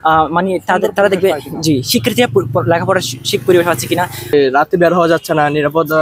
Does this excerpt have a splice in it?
yes; 1 cut; at 4.3 s

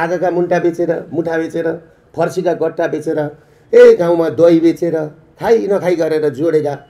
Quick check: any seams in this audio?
no; 0 cuts

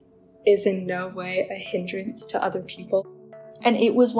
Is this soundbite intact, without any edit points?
no; 1 cut; at 3.3 s

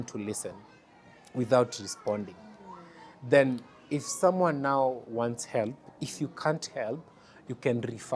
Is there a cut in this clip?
no; 0 cuts

